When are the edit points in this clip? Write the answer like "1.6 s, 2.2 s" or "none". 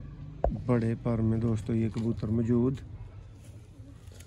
none